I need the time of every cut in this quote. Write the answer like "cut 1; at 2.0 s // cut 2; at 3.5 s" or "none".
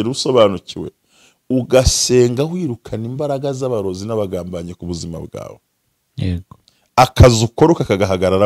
none